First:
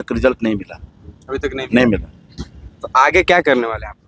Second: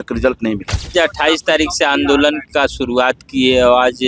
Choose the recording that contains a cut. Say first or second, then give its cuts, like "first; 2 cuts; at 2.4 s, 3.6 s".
second; 1 cut; at 0.9 s